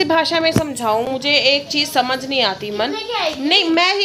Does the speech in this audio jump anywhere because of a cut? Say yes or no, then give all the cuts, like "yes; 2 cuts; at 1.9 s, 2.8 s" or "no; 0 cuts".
no; 0 cuts